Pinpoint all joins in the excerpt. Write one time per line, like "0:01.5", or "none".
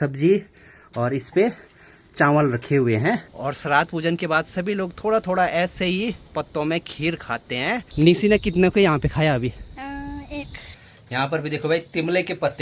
0:03.3
0:07.9
0:10.7

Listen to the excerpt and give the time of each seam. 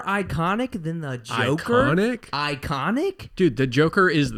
none

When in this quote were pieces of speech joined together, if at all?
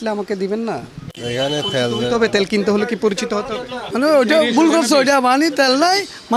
0:03.8

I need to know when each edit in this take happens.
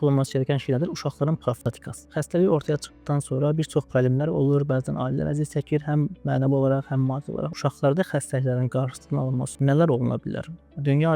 0:01.9
0:07.5

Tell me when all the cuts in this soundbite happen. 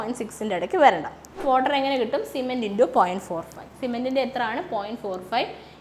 0:01.4

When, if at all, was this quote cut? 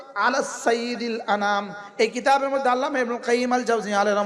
none

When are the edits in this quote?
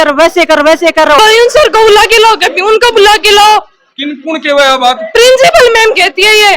0:01.2

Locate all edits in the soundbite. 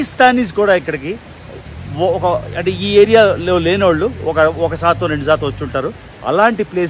none

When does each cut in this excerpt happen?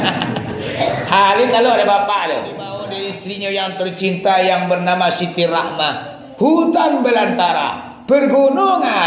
0:02.8

